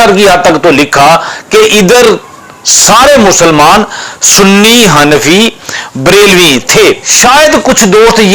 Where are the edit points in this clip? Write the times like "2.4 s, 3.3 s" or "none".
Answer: 7.1 s